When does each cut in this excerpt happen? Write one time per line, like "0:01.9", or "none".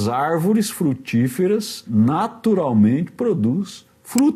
0:01.8